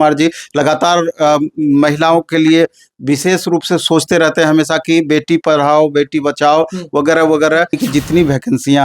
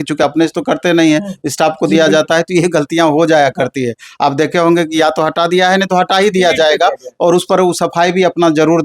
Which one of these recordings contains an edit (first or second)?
first